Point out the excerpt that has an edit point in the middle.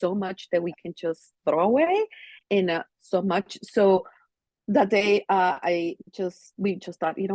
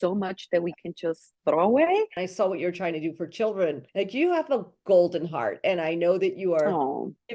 second; 1 cut; at 2.2 s

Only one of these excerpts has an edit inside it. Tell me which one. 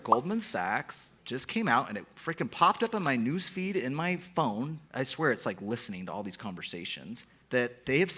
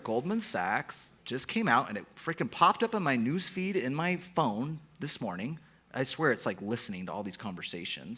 first; 2 cuts; at 4.8 s, 7.3 s

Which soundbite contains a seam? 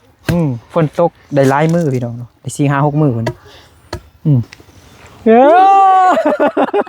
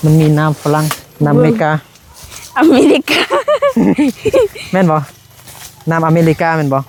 first; 1 cut; at 4.5 s

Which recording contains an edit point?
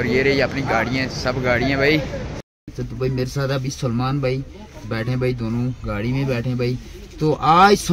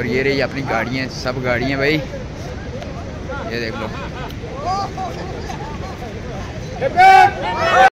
first; 1 cut; at 2.7 s

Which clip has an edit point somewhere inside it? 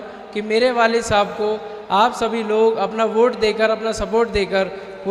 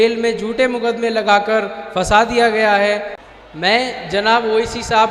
second; 1 cut; at 3.2 s

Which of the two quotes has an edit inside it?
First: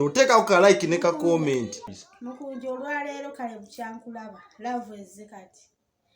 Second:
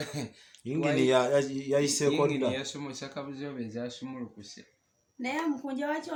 first; 1 cut; at 2.0 s

